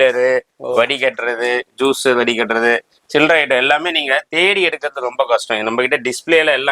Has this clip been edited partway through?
no; 0 cuts

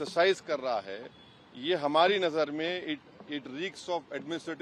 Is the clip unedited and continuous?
yes; 0 cuts

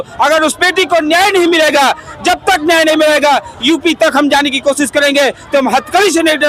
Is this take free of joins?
yes; 0 cuts

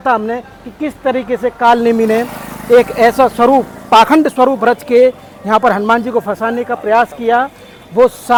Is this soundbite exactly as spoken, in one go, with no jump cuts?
yes; 0 cuts

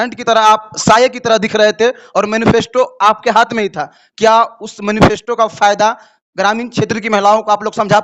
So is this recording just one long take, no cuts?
yes; 0 cuts

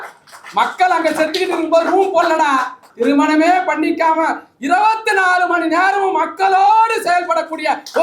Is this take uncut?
no; 1 cut; at 2.8 s

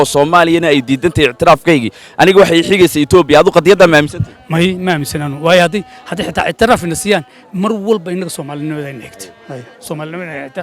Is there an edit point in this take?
no; 0 cuts

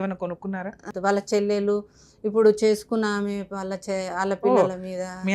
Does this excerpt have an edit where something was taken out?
yes; 1 cut; at 0.9 s

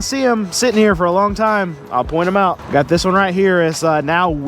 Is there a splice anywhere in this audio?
yes; 1 cut; at 2.6 s

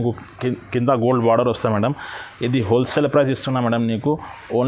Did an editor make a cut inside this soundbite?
no; 0 cuts

